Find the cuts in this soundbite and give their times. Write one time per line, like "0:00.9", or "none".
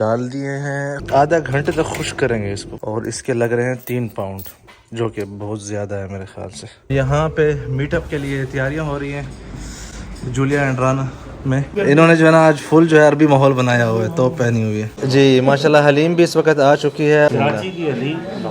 0:01.0
0:02.7
0:06.9
0:11.7
0:15.0
0:17.3